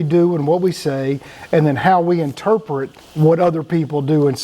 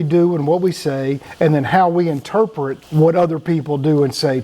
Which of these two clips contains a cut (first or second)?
second